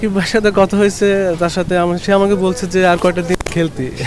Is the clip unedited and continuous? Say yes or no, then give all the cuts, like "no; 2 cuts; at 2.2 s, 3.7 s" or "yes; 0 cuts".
yes; 0 cuts